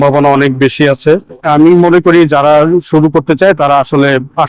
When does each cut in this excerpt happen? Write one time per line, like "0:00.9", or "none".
0:01.4